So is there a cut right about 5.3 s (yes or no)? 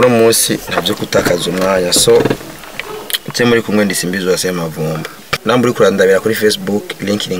yes